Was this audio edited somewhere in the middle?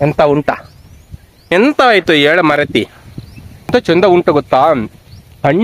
yes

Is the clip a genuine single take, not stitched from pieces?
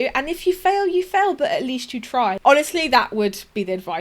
no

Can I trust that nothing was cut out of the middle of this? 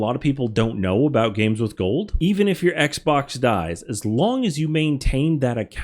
yes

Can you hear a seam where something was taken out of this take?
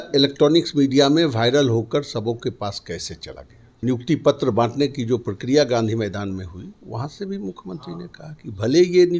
yes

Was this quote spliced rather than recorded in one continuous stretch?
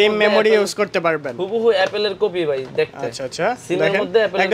no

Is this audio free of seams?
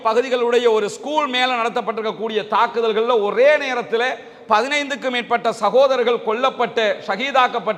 yes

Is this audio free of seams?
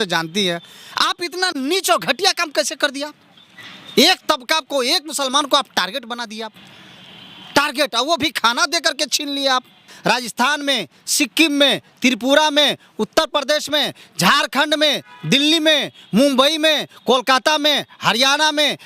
no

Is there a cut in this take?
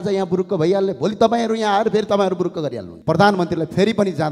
yes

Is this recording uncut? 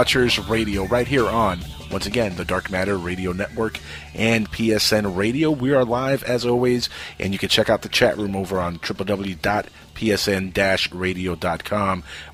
yes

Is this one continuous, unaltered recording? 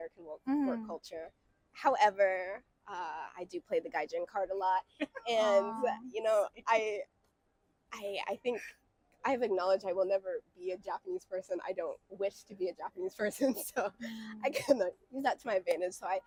yes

